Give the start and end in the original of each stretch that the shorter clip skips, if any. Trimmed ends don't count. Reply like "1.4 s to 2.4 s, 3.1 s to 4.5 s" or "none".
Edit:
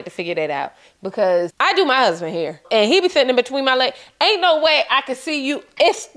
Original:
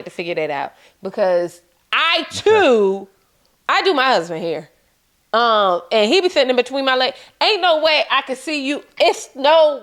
1.5 s to 3.6 s, 4.7 s to 5.8 s

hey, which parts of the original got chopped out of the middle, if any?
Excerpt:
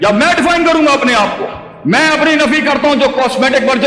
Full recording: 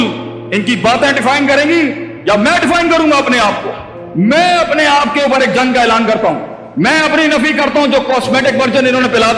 3.9 s to 6.6 s

